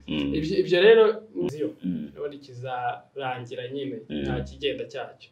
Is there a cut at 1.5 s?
yes; 1 cut; at 1.5 s

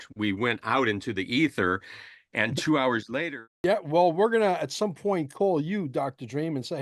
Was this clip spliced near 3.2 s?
yes; 1 cut; at 3.2 s

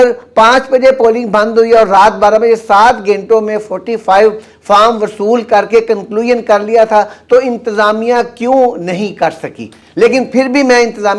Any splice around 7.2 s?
no; 0 cuts

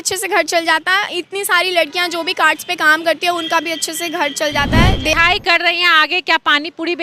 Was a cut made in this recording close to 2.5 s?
no; 1 cut; at 5.1 s

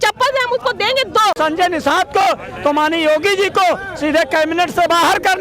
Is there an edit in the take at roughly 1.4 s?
yes; 1 cut; at 1.4 s

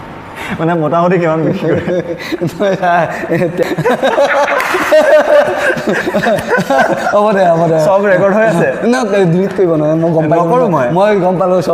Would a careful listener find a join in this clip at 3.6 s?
yes; 1 cut; at 3.6 s

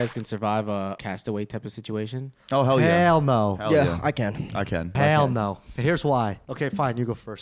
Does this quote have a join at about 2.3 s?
no; 3 cuts; at 1.0 s, 5.0 s, 6.4 s

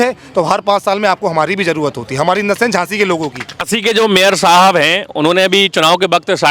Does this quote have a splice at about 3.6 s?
yes; 1 cut; at 3.6 s

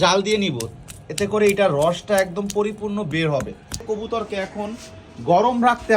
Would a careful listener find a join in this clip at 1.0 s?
no; 1 cut; at 3.8 s

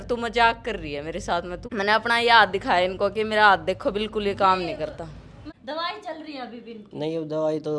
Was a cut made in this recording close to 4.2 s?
no; 2 cuts; at 1.6 s, 5.5 s

